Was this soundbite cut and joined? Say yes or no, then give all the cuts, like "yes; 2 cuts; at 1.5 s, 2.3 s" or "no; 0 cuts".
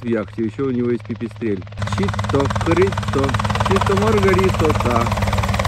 yes; 1 cut; at 1.8 s